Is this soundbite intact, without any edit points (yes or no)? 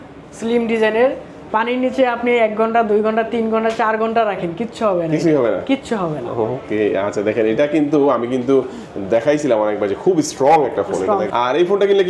no